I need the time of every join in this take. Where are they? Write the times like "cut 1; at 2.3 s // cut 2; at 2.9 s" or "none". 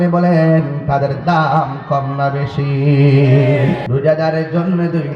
cut 1; at 3.8 s